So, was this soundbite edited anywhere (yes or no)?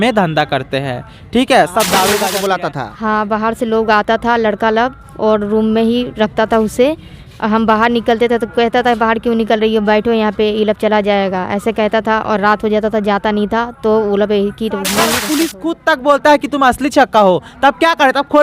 yes